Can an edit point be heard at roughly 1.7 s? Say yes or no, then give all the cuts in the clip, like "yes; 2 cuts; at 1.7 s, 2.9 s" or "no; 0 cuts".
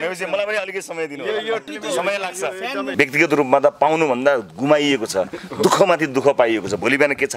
yes; 2 cuts; at 1.7 s, 2.8 s